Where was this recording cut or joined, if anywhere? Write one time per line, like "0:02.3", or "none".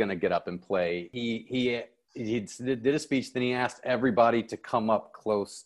0:01.1